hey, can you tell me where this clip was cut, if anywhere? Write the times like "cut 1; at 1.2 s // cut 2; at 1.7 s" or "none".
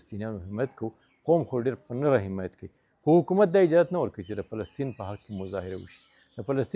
none